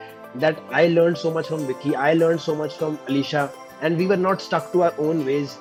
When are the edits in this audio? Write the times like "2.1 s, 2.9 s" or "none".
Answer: none